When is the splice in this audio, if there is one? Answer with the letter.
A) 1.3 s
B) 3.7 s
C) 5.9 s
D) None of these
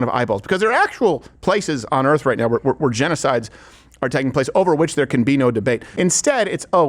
C